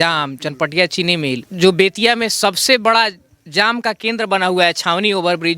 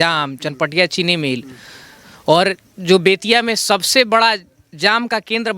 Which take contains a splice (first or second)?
first